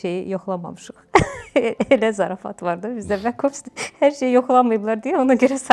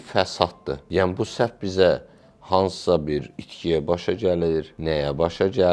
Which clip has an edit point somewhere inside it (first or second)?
second